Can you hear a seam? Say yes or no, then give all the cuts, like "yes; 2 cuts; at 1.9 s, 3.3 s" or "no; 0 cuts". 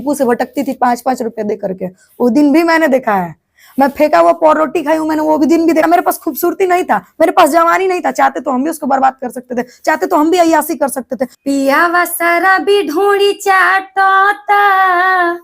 yes; 2 cuts; at 5.8 s, 11.3 s